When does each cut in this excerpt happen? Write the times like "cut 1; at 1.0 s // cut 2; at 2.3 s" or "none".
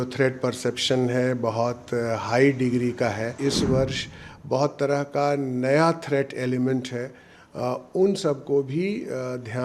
cut 1; at 3.4 s